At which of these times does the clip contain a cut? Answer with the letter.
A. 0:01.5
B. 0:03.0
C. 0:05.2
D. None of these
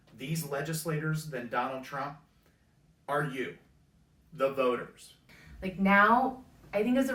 C